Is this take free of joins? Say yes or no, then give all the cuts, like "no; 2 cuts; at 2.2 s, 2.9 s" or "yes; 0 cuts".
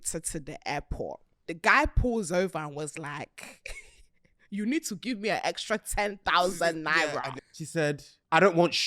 no; 2 cuts; at 1.3 s, 7.6 s